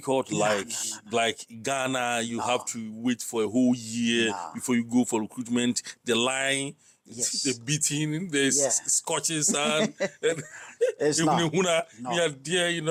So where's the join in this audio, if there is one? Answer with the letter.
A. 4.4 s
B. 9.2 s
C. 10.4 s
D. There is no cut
D